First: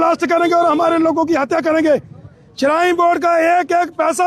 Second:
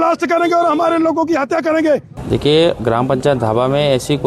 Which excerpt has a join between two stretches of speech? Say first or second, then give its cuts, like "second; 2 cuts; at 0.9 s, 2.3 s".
second; 1 cut; at 2.1 s